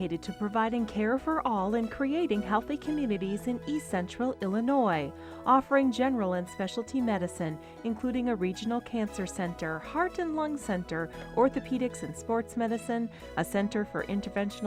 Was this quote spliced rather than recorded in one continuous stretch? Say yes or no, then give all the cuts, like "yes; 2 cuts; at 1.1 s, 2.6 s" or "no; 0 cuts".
no; 0 cuts